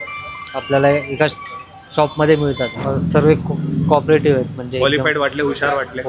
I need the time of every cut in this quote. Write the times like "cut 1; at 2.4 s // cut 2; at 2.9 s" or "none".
cut 1; at 2.8 s